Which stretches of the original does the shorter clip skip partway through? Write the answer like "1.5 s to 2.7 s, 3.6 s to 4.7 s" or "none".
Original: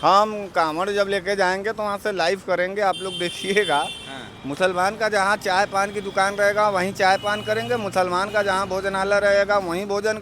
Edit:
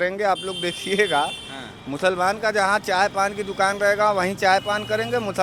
none